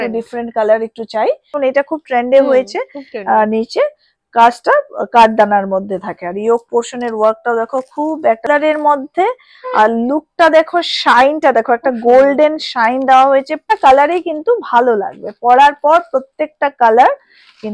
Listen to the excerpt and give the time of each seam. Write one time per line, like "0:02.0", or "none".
0:01.5
0:08.5
0:13.7